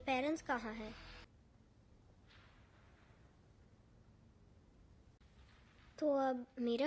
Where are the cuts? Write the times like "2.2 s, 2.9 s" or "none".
1.3 s